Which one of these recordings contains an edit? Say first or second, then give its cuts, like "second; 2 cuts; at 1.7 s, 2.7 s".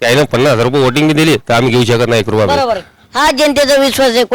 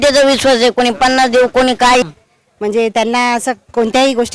second; 1 cut; at 2.1 s